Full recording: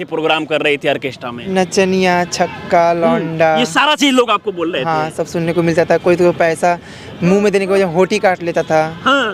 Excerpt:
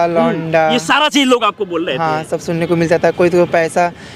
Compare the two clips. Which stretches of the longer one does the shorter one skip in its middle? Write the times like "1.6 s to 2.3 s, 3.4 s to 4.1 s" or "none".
none